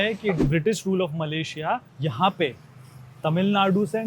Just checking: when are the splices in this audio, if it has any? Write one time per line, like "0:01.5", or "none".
0:01.9